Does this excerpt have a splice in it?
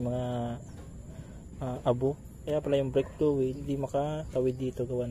yes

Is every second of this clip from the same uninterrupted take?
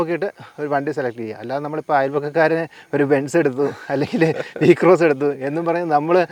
yes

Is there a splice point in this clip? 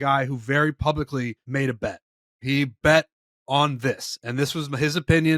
yes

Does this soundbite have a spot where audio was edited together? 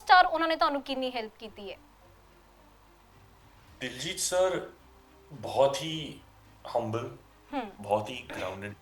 no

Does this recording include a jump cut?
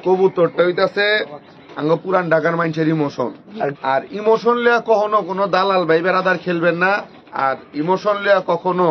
yes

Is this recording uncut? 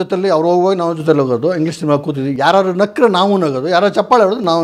yes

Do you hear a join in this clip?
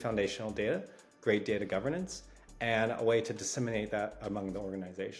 no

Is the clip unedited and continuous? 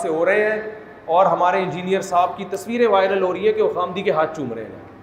yes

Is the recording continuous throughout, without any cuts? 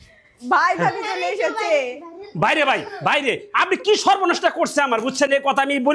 yes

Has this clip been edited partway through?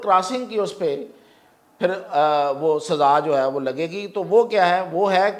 no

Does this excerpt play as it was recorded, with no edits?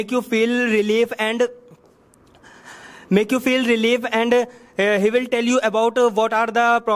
yes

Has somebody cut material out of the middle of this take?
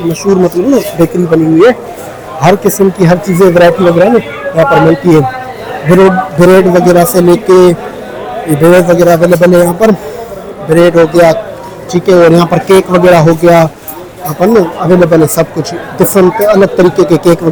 no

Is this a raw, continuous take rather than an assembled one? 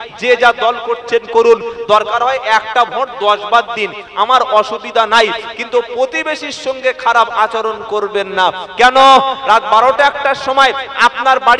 yes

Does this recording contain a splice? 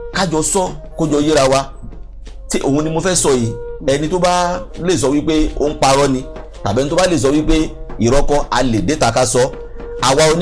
no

